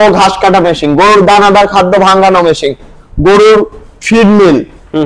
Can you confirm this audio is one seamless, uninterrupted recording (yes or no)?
yes